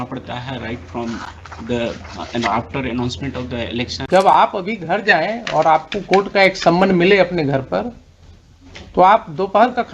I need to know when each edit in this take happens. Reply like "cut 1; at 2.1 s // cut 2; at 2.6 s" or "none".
cut 1; at 4.0 s

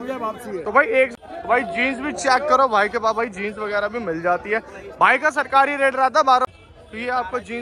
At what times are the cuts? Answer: cut 1; at 1.1 s // cut 2; at 6.4 s

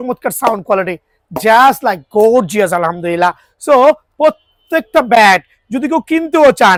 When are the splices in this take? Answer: none

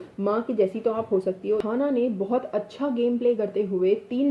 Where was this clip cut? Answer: cut 1; at 1.6 s

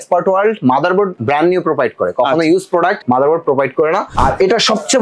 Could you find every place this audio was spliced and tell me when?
cut 1; at 1.2 s // cut 2; at 3.0 s // cut 3; at 4.1 s

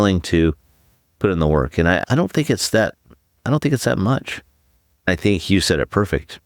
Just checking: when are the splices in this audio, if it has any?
cut 1; at 5.1 s

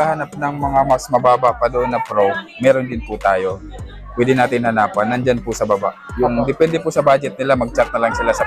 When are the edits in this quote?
none

